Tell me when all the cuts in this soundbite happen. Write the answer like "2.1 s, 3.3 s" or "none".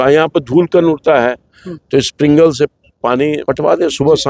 3.4 s